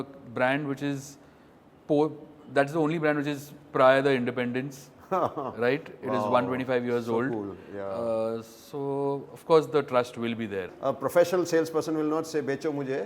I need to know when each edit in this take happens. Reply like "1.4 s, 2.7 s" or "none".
10.7 s